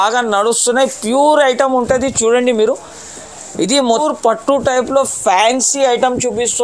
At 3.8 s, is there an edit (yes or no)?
yes